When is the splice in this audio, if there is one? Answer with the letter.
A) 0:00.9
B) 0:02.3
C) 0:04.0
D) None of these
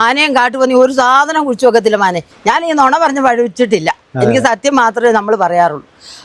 B